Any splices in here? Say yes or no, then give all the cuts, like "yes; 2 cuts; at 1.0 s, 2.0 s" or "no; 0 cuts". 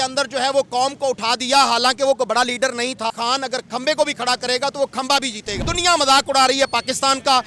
yes; 2 cuts; at 3.1 s, 5.6 s